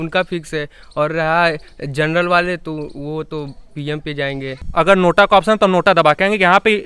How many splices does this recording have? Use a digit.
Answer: 1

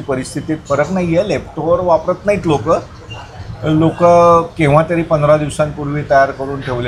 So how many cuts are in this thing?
0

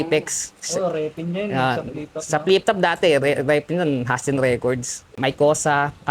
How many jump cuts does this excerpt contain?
1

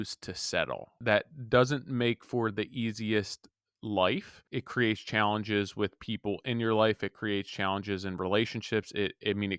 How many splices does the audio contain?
2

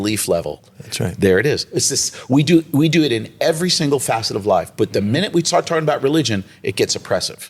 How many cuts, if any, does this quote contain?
0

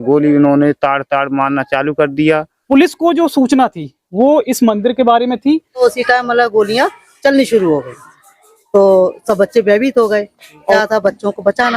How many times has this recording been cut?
3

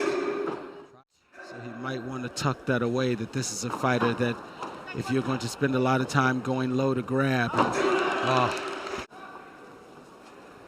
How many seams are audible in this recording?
2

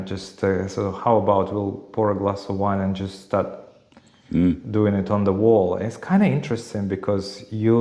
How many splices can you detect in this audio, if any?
0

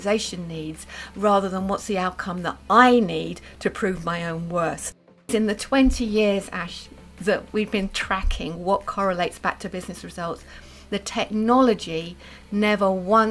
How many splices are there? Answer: 1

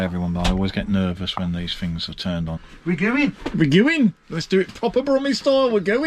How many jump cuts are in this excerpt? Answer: 1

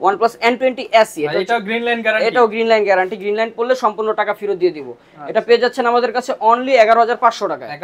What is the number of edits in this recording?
0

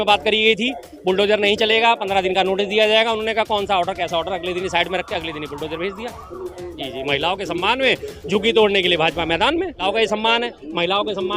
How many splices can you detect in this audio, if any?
2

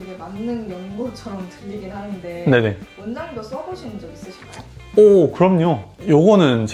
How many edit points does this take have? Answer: 0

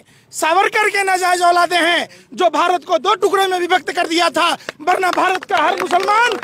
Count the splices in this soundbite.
0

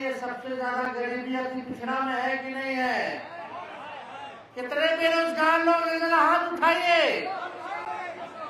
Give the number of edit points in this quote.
0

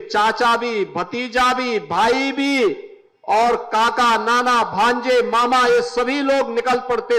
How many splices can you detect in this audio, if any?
0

